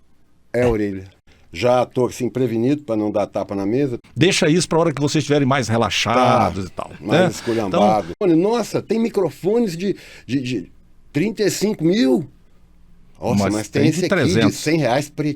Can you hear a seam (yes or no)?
yes